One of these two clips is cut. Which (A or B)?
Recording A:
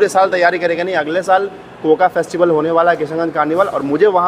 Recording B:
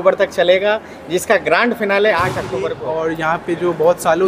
B